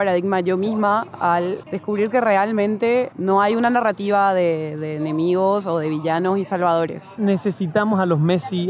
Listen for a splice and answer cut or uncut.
cut